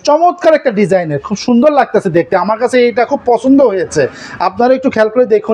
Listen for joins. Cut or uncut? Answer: uncut